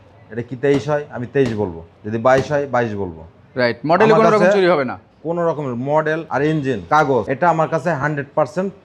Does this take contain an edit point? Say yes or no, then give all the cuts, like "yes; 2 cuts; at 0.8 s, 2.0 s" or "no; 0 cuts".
no; 0 cuts